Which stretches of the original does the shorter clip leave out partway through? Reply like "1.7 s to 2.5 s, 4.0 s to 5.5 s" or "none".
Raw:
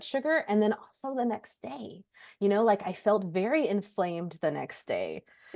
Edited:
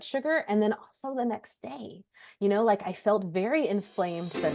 none